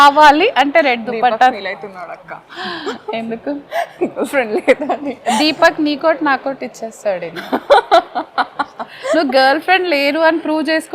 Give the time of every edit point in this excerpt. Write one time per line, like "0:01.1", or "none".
none